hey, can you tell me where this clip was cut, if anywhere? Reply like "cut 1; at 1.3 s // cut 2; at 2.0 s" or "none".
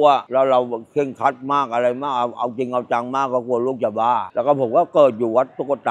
none